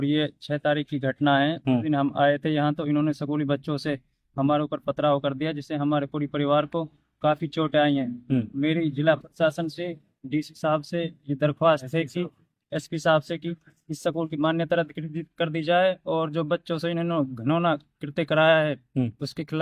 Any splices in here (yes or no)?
no